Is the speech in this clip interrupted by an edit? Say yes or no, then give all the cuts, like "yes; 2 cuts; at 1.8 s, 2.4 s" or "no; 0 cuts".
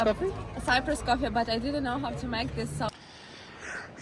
yes; 1 cut; at 2.9 s